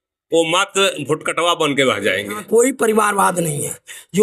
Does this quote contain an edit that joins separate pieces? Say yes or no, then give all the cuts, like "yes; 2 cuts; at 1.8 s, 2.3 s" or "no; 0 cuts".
yes; 1 cut; at 2.4 s